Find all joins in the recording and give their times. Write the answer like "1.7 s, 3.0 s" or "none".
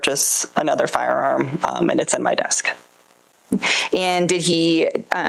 none